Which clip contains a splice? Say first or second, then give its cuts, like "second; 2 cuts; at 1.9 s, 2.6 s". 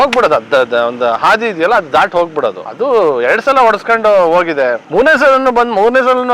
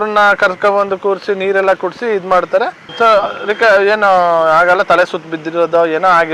first; 1 cut; at 2.7 s